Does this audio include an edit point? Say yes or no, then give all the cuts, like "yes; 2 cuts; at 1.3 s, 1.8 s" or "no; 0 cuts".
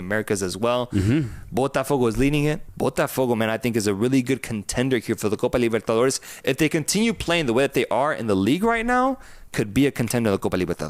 yes; 1 cut; at 2.7 s